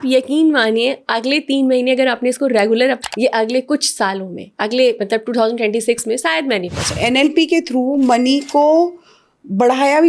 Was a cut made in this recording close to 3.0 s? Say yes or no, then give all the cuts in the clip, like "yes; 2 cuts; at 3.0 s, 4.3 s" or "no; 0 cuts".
yes; 2 cuts; at 3.0 s, 6.9 s